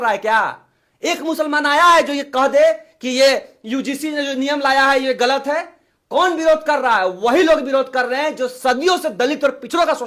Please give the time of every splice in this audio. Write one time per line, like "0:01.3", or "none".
none